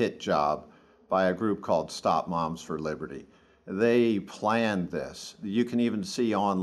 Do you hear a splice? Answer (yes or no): no